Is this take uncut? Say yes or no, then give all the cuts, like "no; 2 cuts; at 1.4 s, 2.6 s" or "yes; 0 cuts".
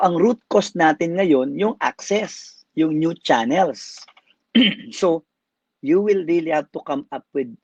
yes; 0 cuts